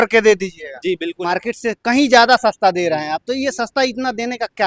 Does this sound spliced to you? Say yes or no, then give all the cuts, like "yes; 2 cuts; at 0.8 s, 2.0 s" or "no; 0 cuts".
yes; 1 cut; at 1.1 s